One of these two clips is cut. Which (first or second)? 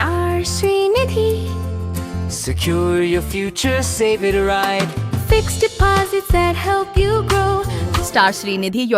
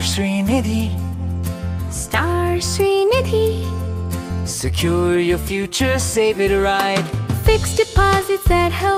first